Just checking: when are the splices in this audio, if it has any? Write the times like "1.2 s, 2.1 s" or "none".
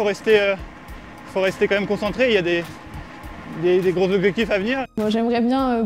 4.8 s

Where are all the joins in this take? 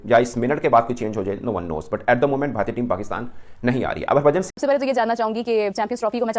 4.5 s

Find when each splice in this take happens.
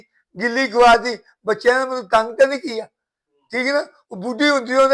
none

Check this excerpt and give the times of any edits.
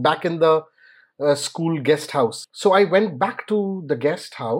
2.5 s

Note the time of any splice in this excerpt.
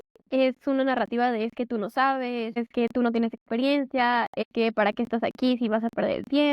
2.6 s, 4.4 s

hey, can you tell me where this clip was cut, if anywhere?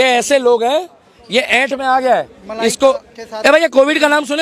none

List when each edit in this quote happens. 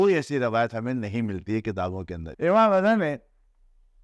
2.2 s

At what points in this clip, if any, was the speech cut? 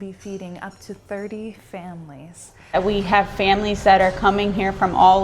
2.7 s

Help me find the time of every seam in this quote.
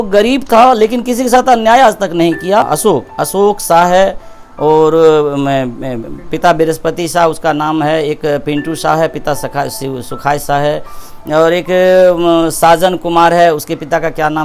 2.7 s

